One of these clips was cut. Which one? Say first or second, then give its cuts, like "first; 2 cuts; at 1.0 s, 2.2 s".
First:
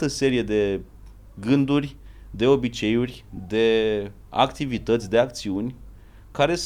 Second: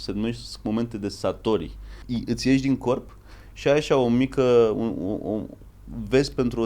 second; 1 cut; at 2.0 s